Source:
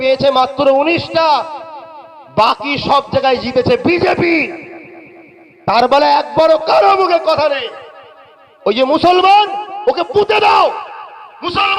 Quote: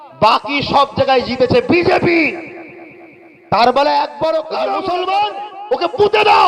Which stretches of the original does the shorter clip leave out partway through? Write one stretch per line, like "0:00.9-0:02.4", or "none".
0:06.9-0:08.9

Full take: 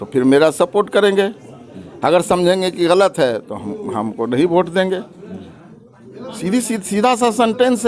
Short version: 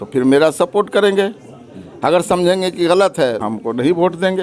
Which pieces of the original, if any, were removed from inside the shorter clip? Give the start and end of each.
0:03.4-0:04.0

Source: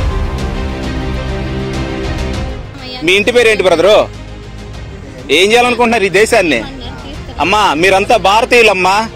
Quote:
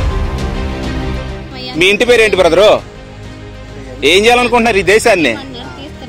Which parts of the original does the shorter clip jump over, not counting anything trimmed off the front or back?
0:01.4-0:02.7

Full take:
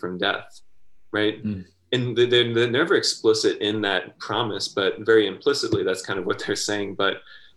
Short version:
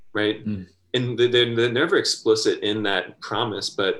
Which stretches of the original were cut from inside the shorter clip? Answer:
none

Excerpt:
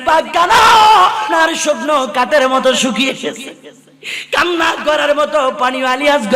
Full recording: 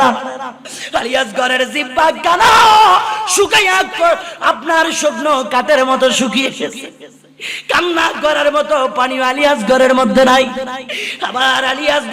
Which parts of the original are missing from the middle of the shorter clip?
0:03.2-0:04.6

